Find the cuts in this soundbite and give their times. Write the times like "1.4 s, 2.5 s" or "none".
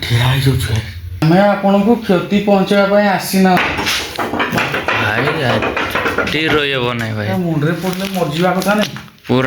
1.2 s